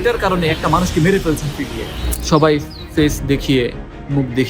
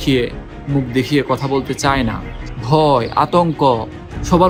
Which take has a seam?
first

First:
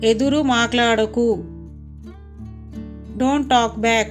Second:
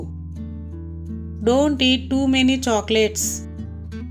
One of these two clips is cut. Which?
first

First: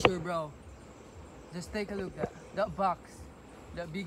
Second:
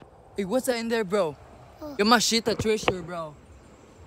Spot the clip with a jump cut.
second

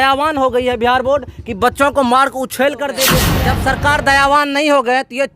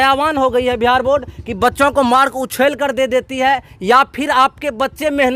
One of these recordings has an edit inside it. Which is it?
first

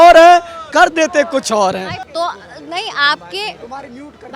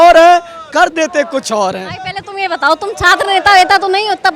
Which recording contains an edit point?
first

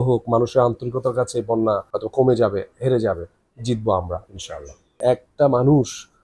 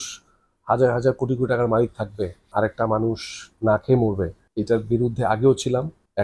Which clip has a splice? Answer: first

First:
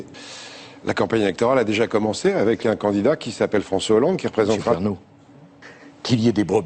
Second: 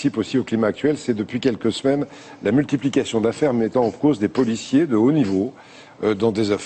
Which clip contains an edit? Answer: second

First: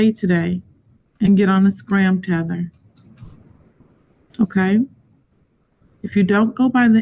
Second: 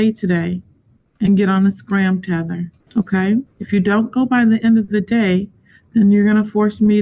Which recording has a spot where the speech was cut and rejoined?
second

